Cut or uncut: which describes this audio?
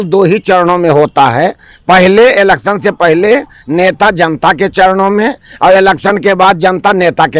uncut